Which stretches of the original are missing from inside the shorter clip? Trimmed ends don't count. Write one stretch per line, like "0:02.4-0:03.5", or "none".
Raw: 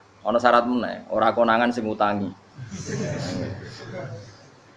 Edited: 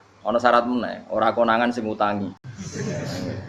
0:02.5-0:02.6